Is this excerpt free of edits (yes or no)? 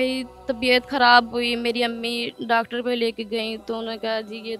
yes